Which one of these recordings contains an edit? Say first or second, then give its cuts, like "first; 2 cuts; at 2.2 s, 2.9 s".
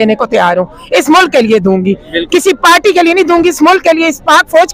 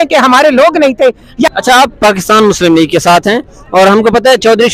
second; 1 cut; at 1.5 s